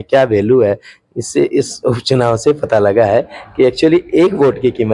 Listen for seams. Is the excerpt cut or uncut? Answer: uncut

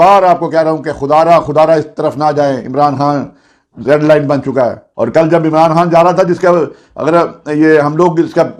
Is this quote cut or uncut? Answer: cut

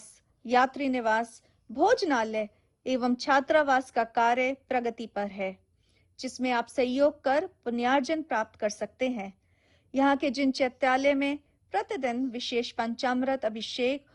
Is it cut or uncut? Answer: uncut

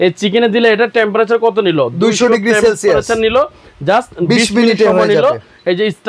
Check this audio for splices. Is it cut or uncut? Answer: uncut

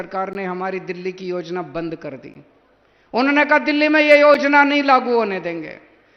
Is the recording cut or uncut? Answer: uncut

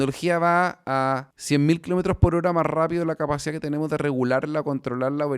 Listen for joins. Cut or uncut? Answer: cut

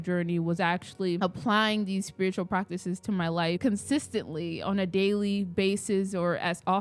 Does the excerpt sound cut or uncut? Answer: uncut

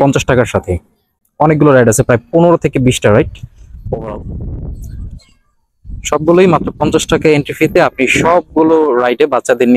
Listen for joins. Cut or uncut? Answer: uncut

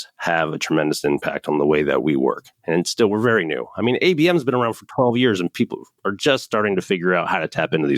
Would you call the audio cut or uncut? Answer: uncut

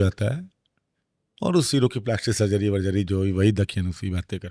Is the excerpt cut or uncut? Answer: uncut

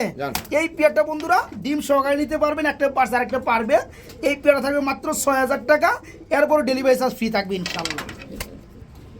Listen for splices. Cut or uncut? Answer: uncut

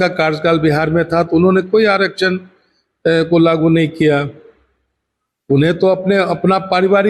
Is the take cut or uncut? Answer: uncut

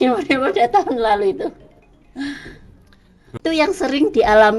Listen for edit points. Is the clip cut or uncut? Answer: cut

